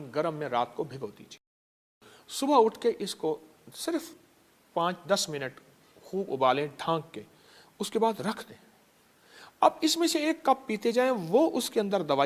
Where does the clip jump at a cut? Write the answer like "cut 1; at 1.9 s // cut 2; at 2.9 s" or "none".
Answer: none